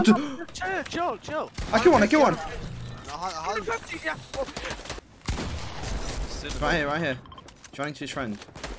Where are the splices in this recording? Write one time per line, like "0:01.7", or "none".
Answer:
none